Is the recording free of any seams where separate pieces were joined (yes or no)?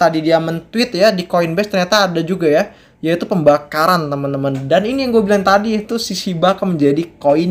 yes